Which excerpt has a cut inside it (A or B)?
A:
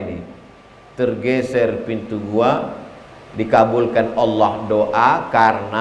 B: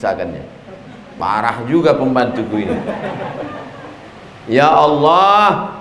B